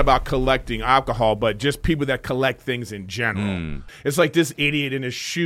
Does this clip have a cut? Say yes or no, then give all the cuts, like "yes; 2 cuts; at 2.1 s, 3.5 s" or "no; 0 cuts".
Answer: yes; 1 cut; at 3.8 s